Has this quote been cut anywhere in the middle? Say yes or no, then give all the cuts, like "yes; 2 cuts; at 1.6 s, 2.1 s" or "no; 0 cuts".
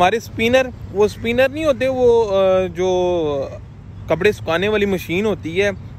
no; 0 cuts